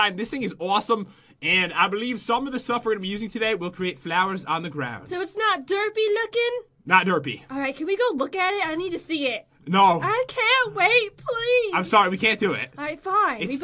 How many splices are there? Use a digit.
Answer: 1